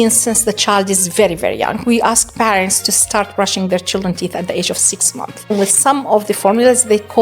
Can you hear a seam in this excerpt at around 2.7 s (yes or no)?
no